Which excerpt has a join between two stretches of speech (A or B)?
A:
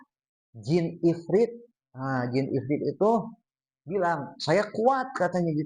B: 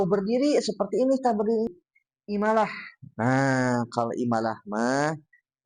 B